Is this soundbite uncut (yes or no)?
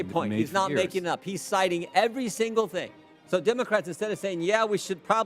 no